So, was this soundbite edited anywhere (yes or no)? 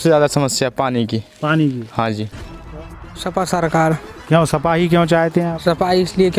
yes